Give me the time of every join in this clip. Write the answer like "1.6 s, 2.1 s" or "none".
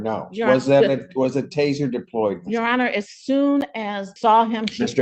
4.1 s